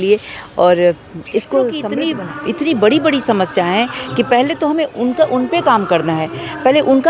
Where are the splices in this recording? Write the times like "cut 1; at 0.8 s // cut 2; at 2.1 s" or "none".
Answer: cut 1; at 1.9 s